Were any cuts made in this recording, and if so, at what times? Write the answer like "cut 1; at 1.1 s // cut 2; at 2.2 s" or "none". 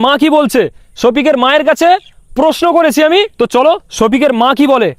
cut 1; at 3.3 s